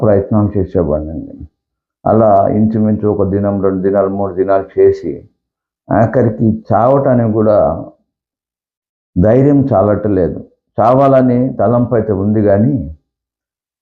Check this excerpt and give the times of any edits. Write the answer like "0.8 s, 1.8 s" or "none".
none